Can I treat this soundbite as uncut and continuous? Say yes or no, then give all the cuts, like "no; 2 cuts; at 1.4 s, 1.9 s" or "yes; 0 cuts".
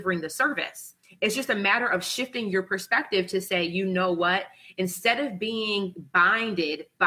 yes; 0 cuts